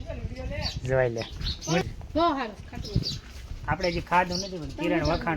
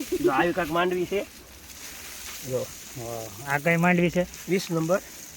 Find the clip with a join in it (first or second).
first